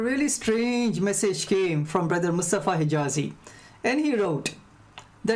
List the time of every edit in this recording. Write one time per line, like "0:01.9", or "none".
0:02.0
0:03.3